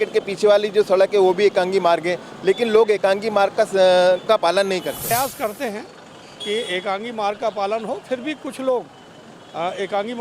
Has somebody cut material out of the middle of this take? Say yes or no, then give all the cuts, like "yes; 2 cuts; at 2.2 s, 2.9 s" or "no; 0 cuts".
yes; 1 cut; at 5.1 s